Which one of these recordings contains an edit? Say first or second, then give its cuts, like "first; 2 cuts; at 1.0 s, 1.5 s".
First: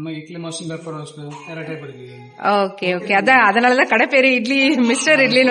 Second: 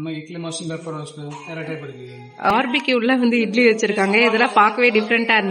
second; 1 cut; at 2.5 s